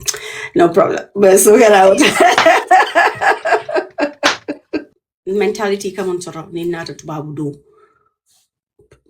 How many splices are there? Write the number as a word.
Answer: one